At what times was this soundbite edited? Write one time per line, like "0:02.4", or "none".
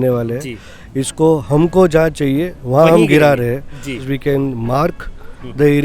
0:04.0